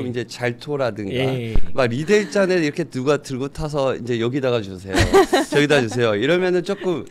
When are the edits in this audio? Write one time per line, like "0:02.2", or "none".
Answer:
none